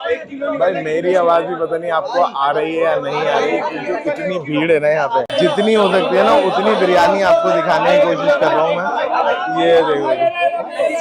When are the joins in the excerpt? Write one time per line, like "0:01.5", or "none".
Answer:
none